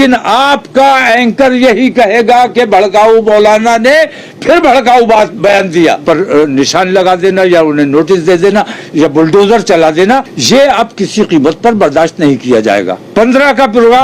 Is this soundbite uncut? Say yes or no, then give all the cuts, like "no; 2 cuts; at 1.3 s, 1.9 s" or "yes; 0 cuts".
no; 3 cuts; at 6.0 s, 10.3 s, 13.0 s